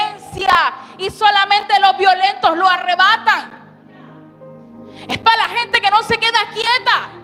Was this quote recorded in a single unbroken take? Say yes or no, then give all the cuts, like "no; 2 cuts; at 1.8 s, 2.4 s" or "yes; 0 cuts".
yes; 0 cuts